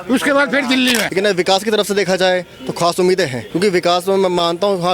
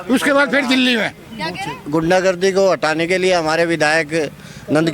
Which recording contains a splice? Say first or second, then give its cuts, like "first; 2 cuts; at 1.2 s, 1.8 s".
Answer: first; 2 cuts; at 1.1 s, 3.4 s